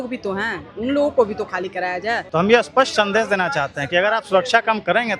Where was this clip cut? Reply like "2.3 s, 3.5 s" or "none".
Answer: 2.2 s